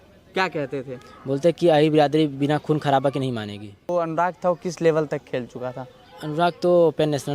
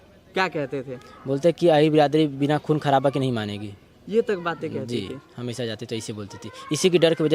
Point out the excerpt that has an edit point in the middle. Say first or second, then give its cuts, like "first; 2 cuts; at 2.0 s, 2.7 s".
first; 1 cut; at 3.9 s